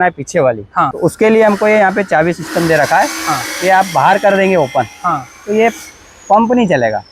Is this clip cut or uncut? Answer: cut